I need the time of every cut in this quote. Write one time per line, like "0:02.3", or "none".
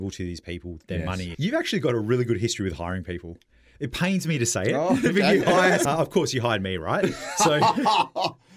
0:01.3
0:05.9

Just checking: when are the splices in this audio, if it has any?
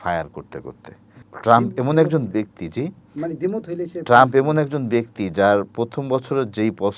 none

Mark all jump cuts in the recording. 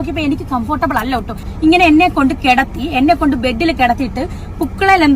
0:01.5

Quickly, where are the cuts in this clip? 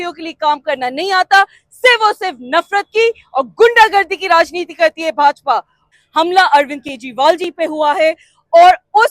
0:05.9

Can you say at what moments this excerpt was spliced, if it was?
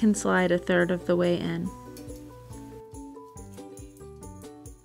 0:01.7

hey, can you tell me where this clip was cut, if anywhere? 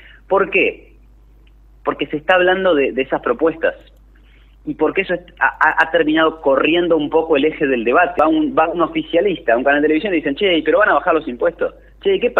0:08.2

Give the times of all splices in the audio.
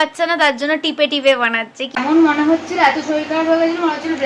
0:02.0

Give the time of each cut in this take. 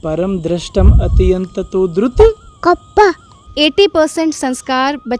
0:03.5

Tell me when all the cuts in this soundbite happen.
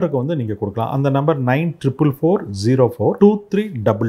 0:03.2

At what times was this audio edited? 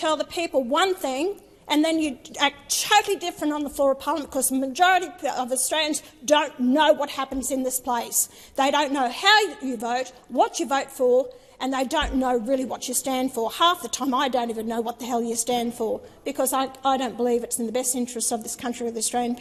none

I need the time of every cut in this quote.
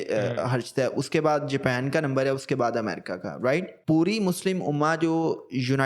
0:03.7

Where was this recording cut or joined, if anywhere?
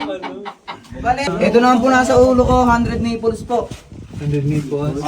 0:01.3

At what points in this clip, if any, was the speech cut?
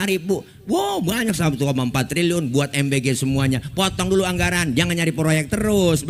none

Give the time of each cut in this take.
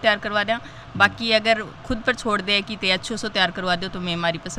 none

